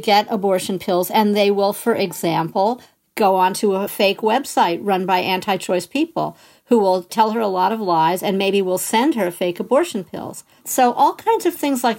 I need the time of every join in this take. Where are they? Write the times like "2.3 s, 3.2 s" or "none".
3.9 s, 7.1 s, 10.6 s

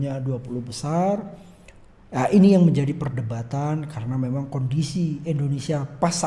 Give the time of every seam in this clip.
none

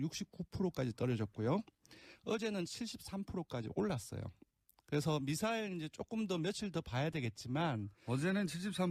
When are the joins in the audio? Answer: none

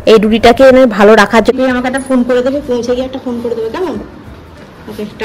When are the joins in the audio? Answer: 1.5 s

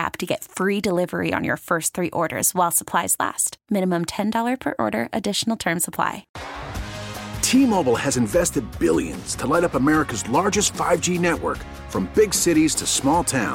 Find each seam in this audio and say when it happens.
6.3 s

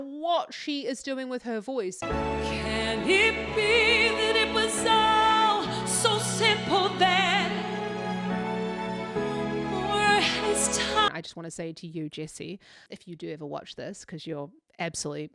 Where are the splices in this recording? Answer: 2.0 s, 11.1 s, 12.8 s

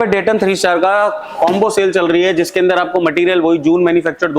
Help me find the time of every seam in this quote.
none

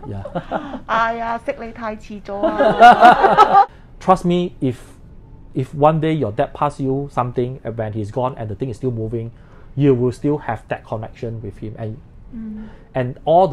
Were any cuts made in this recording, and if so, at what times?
3.8 s

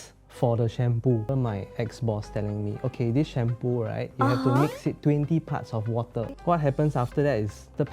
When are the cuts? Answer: 1.3 s, 6.3 s

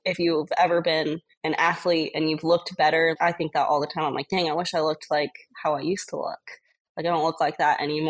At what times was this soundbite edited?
1.3 s

